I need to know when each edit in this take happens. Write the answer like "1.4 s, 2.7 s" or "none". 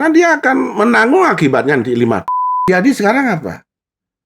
2.7 s

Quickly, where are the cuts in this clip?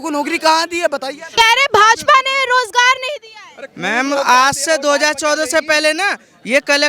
1.3 s

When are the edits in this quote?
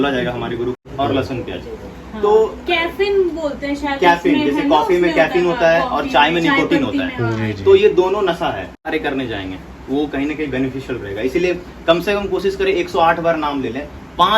0.8 s, 8.8 s

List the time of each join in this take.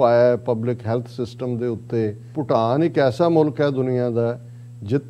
2.3 s

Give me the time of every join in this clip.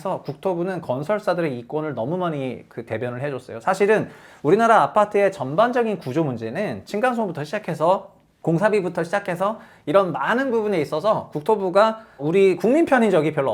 none

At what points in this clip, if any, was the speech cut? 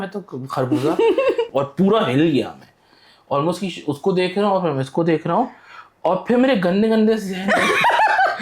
1.5 s

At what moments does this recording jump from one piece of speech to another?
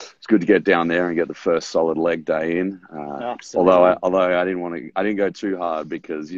5.3 s

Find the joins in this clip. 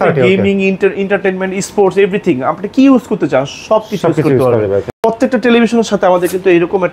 5.0 s

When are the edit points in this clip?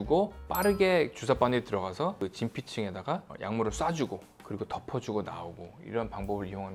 none

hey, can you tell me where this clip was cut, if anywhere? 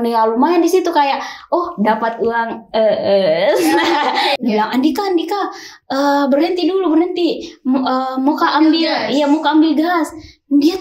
4.4 s

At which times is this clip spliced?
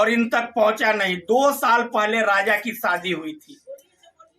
none

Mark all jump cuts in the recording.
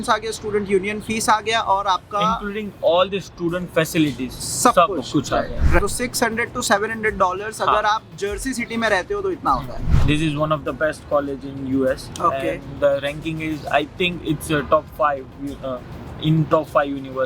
5.8 s, 9.9 s

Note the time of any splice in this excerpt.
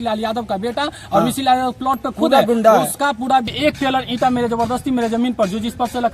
3.5 s

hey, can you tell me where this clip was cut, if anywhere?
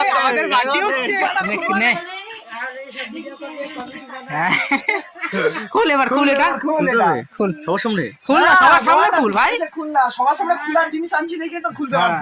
1.5 s

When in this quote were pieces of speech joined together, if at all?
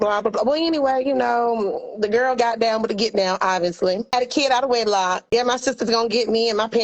4.1 s, 5.2 s

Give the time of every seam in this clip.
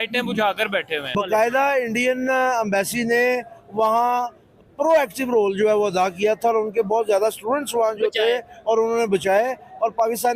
1.1 s

